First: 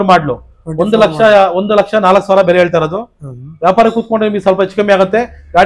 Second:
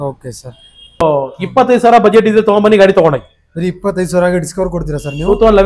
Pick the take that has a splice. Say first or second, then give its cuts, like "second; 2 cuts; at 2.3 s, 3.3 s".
second; 1 cut; at 1.0 s